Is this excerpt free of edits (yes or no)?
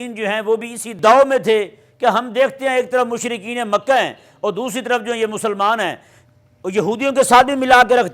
no